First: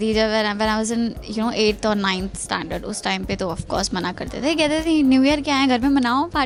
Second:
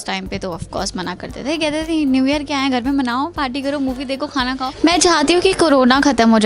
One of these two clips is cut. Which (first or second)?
second